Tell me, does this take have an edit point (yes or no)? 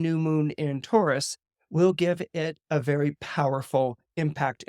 no